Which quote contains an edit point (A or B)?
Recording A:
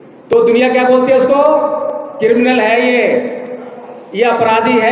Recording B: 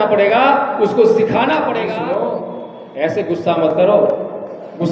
B